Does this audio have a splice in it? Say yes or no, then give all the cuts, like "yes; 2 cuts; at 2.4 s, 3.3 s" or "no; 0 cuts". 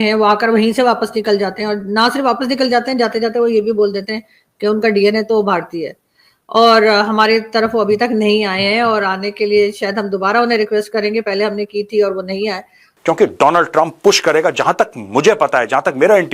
yes; 1 cut; at 12.9 s